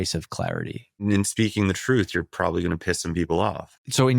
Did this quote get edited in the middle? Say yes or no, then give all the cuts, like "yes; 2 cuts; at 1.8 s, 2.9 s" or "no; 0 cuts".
yes; 1 cut; at 1.0 s